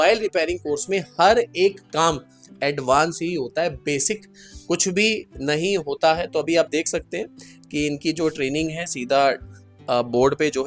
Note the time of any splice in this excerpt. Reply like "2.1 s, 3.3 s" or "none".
none